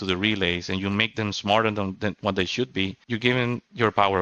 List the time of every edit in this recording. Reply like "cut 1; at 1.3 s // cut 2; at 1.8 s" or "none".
cut 1; at 3.0 s